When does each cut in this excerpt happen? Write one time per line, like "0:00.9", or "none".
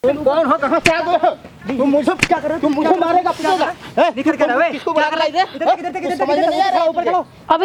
none